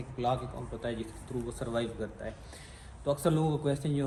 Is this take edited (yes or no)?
no